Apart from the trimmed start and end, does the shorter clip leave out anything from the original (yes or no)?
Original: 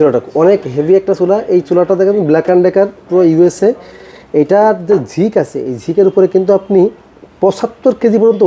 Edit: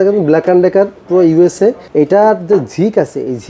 yes